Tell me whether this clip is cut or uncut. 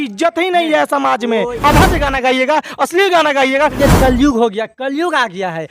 cut